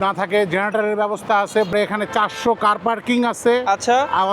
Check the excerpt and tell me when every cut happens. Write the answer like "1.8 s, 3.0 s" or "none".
1.7 s